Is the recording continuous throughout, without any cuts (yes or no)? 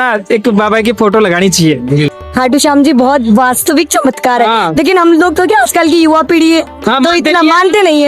no